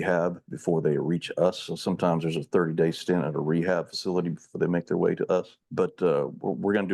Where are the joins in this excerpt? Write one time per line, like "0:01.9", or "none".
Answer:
0:05.6